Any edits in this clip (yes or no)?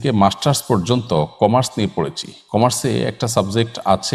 no